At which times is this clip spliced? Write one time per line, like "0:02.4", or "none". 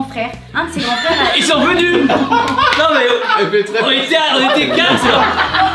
0:04.9

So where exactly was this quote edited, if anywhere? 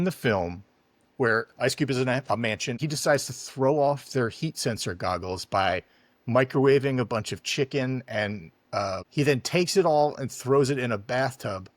0:02.8
0:09.0

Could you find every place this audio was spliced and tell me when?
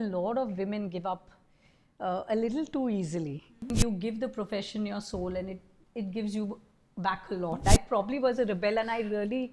0:03.6
0:07.6

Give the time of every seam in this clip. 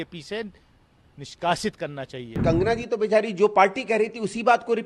0:02.4

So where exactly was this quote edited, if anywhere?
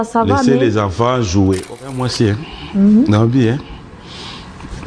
0:01.8

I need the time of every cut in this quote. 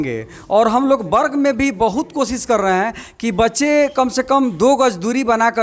none

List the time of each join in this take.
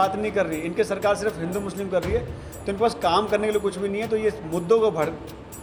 none

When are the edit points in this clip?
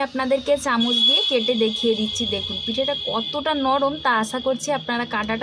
none

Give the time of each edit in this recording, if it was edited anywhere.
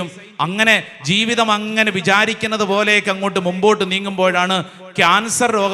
none

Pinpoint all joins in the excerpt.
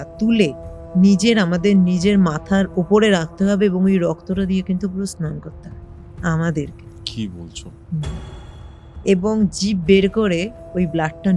none

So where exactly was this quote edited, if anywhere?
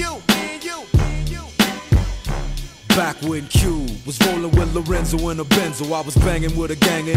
none

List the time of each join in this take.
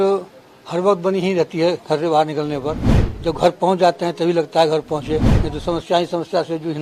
none

